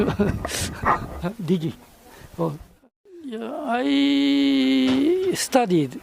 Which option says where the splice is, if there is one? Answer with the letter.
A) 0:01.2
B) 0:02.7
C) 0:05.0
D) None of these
B